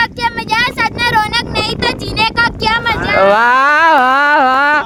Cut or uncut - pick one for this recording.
uncut